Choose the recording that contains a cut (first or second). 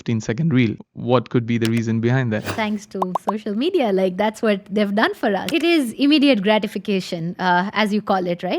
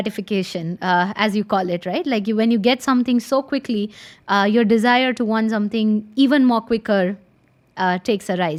first